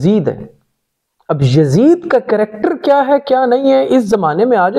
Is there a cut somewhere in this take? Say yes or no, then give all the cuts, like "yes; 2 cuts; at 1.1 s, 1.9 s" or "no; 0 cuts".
no; 0 cuts